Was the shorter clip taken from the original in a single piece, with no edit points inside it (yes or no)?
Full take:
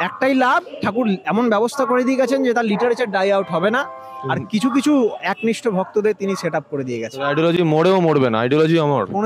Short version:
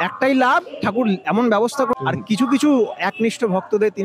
no